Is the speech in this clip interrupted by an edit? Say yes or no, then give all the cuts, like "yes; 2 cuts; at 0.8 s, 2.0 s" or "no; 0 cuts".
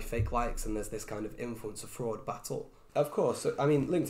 yes; 1 cut; at 2.8 s